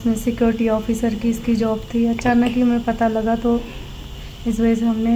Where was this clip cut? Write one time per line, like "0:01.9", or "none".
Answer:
none